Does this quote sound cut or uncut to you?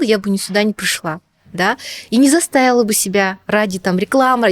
uncut